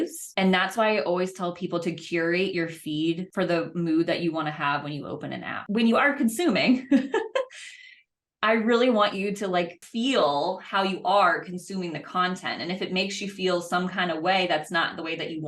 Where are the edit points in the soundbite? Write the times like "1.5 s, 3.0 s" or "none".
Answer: 5.6 s